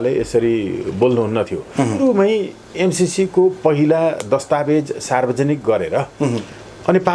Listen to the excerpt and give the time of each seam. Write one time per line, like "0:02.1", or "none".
0:02.0